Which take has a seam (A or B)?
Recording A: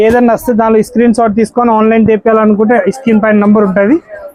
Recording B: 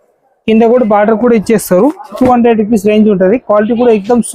B